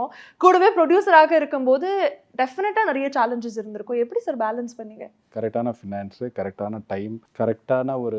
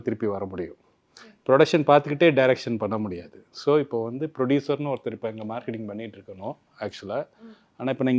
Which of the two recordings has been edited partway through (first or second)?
first